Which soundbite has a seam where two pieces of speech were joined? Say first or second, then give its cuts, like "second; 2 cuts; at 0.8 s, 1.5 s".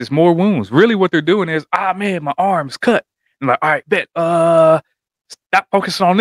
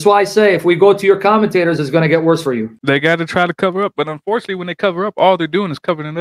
second; 1 cut; at 2.7 s